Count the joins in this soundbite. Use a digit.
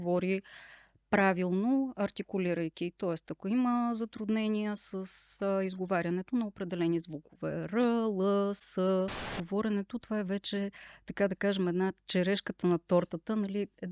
1